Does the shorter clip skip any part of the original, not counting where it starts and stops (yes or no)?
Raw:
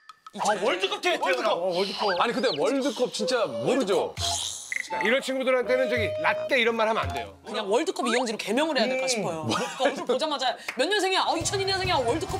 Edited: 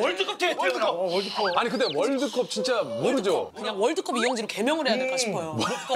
yes